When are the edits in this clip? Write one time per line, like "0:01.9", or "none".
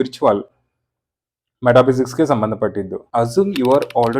0:03.0